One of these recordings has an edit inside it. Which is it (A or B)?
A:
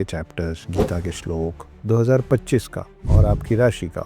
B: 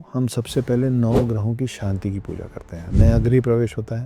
A